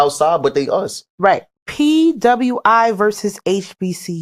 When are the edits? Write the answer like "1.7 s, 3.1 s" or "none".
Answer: 1.5 s